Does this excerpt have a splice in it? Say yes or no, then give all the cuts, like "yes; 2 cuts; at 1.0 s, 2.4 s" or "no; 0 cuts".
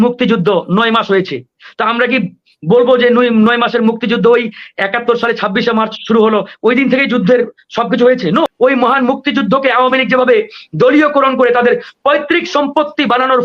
yes; 1 cut; at 8.5 s